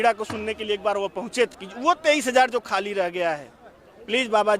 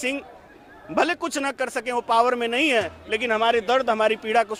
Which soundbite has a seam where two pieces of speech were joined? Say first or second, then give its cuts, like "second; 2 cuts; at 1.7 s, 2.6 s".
first; 1 cut; at 1.7 s